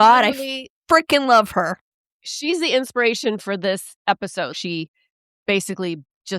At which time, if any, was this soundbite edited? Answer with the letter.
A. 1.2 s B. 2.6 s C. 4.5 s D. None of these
C